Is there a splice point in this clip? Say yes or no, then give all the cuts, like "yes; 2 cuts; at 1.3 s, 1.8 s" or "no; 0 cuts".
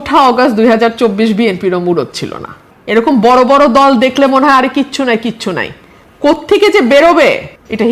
no; 0 cuts